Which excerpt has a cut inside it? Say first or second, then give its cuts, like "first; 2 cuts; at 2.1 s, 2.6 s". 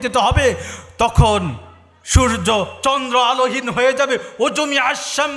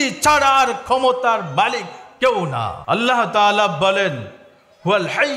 second; 1 cut; at 2.8 s